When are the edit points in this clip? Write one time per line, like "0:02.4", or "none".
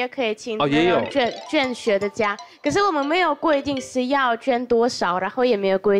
none

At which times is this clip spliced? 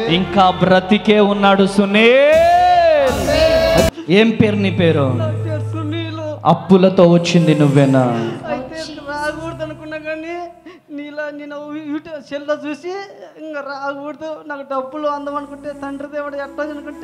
0:03.9

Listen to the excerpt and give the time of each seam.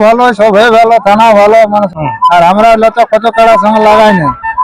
0:01.9

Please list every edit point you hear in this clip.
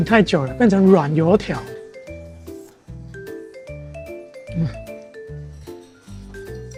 none

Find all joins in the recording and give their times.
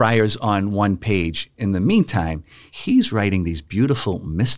none

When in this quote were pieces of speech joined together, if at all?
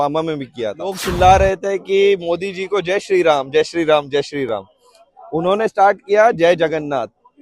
0:01.0

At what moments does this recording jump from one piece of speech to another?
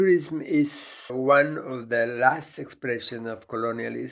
0:01.1

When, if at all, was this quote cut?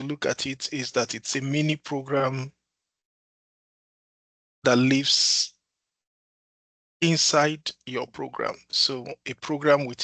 none

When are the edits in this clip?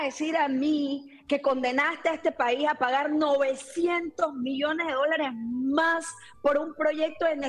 none

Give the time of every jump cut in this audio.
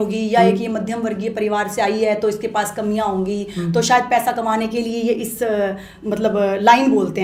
none

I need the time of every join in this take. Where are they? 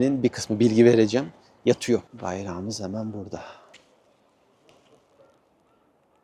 none

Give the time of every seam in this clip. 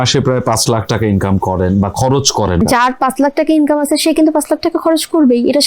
0:02.6

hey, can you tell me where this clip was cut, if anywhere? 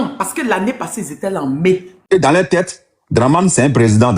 0:02.1

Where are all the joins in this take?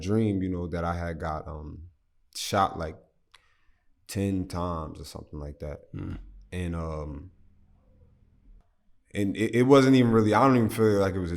none

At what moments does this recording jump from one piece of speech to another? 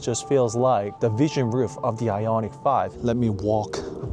0:00.9
0:02.9

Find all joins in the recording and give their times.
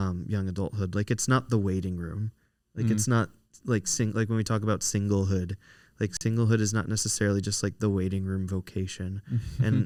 none

